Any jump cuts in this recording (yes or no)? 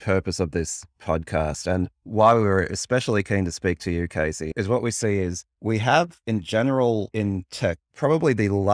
yes